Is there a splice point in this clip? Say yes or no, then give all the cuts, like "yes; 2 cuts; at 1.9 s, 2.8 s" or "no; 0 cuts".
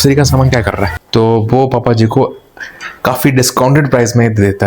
yes; 1 cut; at 1.0 s